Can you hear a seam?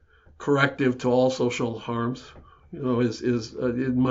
no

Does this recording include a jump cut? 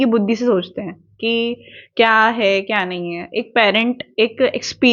no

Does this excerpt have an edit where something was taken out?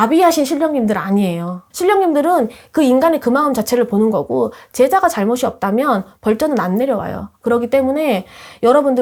no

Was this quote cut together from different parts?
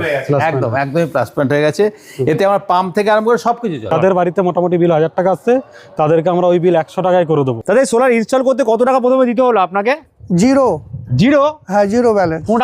yes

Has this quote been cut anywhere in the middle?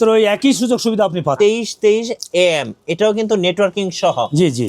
yes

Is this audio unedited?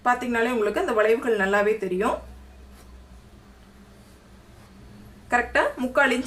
yes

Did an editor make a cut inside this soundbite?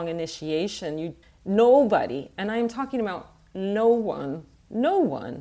yes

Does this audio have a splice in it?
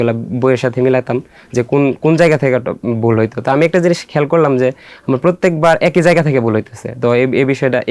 no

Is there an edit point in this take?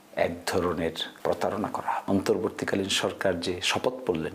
yes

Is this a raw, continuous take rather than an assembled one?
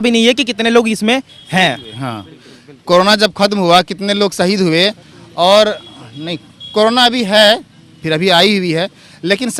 yes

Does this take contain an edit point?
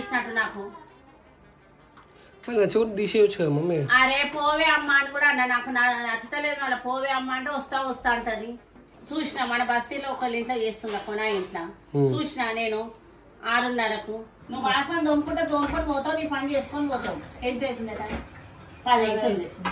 yes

